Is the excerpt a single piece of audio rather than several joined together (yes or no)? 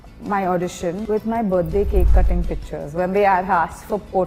no